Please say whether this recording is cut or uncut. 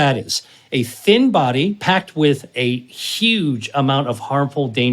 cut